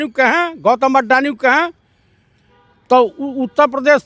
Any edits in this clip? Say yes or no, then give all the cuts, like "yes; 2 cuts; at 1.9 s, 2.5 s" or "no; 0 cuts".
no; 0 cuts